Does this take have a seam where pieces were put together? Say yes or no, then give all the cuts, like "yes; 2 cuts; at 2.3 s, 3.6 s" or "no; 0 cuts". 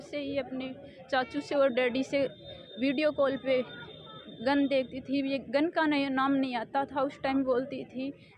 no; 0 cuts